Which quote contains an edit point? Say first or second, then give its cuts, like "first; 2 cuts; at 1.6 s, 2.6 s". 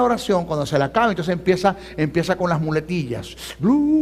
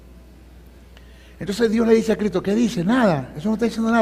second; 1 cut; at 2.8 s